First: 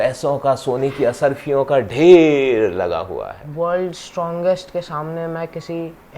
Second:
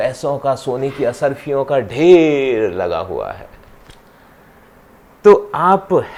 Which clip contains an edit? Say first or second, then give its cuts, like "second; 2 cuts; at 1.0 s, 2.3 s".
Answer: first; 1 cut; at 3.4 s